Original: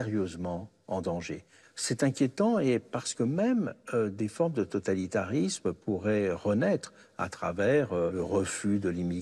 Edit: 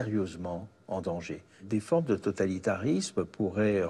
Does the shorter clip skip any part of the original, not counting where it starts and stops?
yes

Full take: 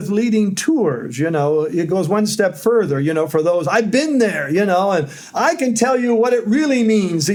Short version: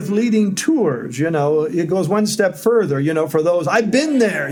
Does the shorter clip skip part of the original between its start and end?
no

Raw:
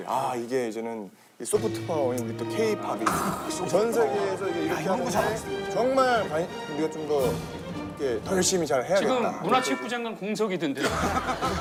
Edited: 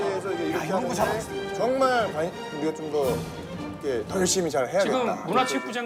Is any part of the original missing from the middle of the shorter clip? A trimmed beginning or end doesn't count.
no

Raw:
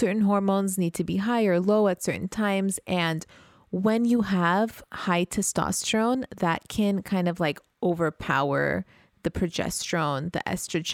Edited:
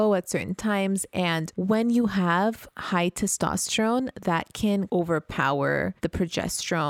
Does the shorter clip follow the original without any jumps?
no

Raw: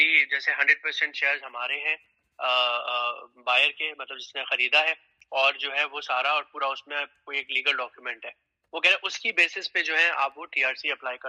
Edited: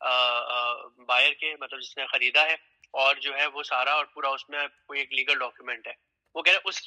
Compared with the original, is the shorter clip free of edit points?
yes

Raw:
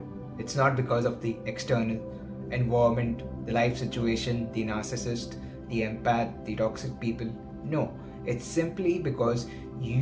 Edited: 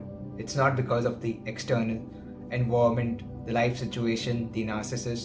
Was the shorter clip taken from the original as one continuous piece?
yes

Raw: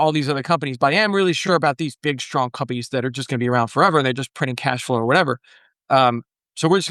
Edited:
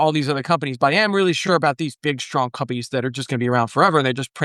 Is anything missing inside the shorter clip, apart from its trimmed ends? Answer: no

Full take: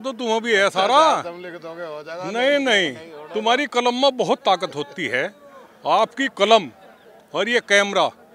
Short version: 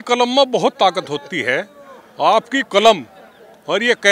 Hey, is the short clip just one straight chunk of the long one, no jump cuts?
yes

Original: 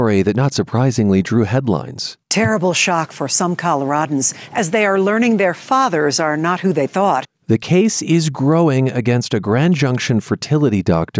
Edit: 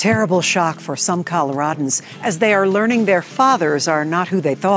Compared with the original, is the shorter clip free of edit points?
yes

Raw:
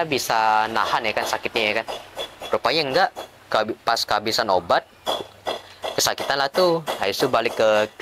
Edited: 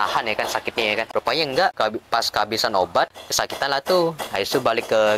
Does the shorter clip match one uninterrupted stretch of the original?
no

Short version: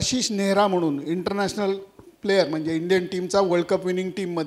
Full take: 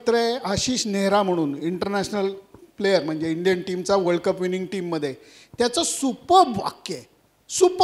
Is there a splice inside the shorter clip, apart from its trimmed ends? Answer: no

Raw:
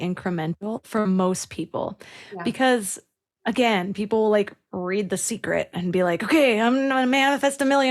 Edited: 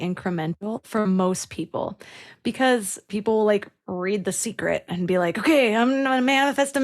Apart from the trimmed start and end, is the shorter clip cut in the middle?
yes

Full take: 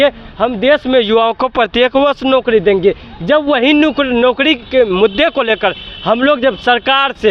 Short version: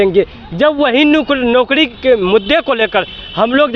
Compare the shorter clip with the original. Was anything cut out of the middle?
no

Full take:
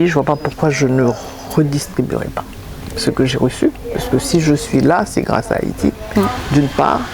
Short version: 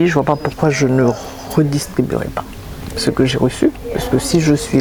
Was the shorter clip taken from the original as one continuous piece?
yes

